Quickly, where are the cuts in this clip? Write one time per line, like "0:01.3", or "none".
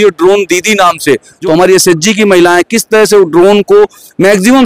0:01.3